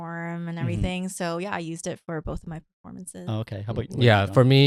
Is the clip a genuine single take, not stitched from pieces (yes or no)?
yes